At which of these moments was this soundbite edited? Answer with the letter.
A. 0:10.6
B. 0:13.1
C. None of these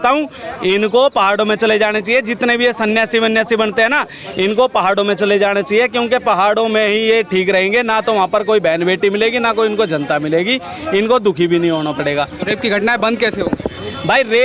C